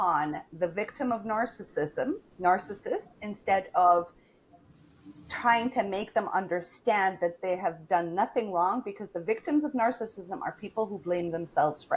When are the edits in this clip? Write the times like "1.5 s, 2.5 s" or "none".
none